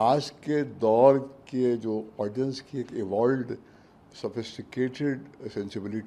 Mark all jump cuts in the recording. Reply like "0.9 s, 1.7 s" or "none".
none